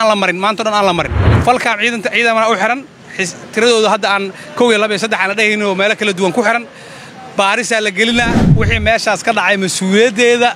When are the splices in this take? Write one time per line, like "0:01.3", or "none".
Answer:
0:01.2
0:08.4